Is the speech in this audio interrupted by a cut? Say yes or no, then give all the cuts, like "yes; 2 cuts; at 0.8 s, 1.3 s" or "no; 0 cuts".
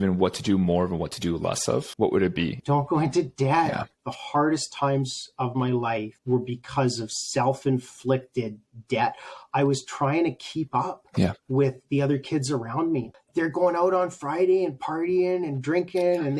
yes; 4 cuts; at 2.6 s, 3.9 s, 6.1 s, 13.2 s